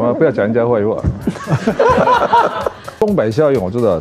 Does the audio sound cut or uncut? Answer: cut